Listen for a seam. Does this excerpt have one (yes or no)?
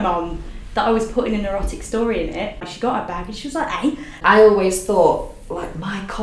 yes